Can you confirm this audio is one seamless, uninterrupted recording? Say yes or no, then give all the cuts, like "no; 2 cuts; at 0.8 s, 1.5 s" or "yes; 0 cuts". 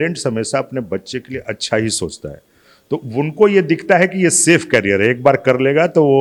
yes; 0 cuts